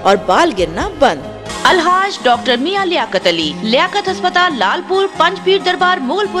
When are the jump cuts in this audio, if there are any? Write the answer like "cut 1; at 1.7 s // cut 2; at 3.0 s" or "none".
cut 1; at 1.5 s